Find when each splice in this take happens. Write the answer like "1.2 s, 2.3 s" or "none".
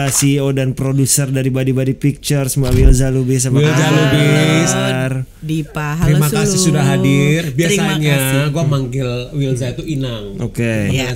none